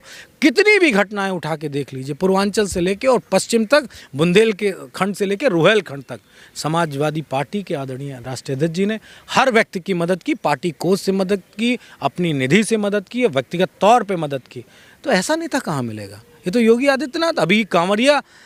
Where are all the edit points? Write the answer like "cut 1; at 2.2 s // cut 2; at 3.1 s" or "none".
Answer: none